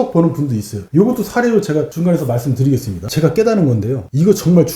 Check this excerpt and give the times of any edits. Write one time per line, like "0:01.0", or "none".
0:03.0